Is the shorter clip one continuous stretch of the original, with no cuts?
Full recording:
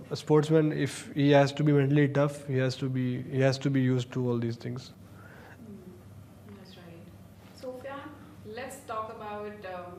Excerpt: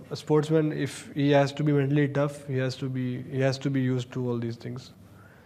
yes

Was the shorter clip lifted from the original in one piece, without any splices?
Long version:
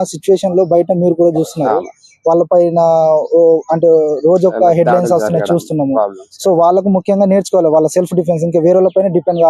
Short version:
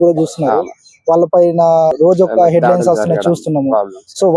no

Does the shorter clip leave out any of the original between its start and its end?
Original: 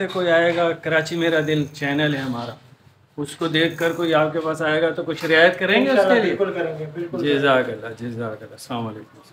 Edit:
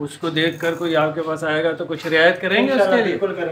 no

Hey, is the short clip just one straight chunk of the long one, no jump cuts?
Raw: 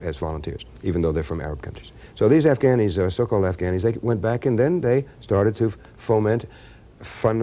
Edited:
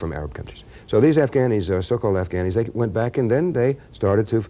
yes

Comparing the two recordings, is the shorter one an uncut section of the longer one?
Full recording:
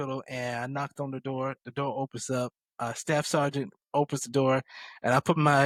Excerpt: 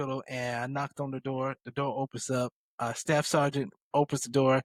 yes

